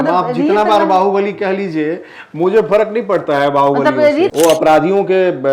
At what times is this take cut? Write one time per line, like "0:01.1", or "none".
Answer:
0:04.3